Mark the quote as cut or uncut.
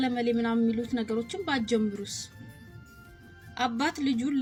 uncut